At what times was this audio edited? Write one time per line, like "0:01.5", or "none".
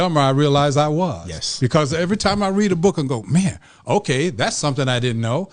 none